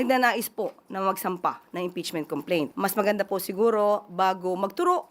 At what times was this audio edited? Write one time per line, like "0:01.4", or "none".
0:02.7